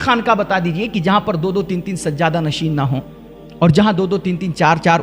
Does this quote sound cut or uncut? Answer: uncut